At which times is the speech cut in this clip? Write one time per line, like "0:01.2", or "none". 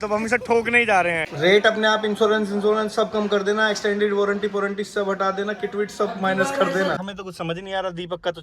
0:01.2
0:07.0